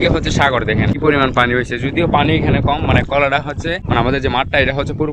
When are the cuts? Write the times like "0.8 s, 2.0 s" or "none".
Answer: 1.0 s, 3.8 s